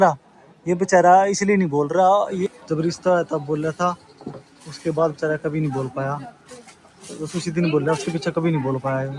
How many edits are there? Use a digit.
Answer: 0